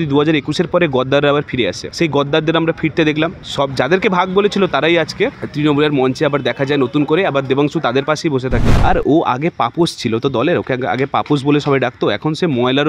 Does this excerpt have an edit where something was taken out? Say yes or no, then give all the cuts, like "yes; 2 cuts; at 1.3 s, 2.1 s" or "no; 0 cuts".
yes; 4 cuts; at 1.8 s, 3.4 s, 5.4 s, 8.7 s